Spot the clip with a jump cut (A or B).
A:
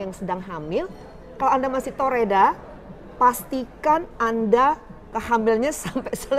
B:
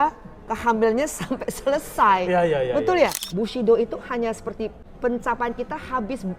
B